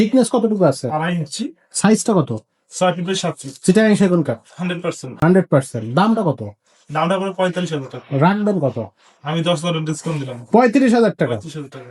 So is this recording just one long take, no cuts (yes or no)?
yes